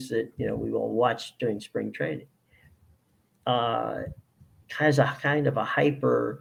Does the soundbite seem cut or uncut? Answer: uncut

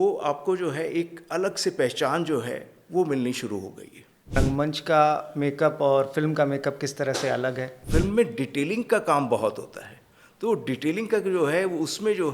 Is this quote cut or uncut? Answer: cut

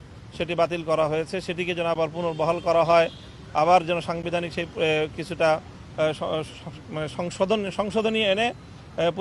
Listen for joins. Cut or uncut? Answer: uncut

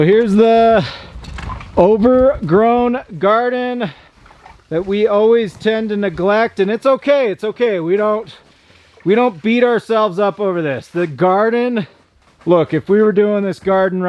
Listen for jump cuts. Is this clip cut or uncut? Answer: uncut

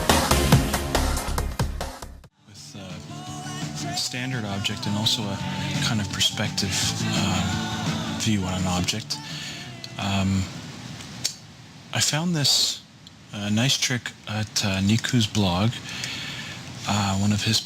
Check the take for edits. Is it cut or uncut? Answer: cut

